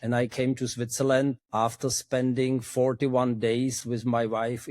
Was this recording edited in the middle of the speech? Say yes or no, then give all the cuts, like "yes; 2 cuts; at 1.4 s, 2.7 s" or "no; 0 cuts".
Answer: yes; 1 cut; at 1.4 s